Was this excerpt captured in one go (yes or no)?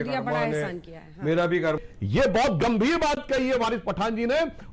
no